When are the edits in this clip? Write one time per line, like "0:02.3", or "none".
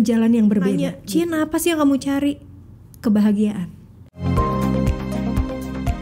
0:01.0
0:04.1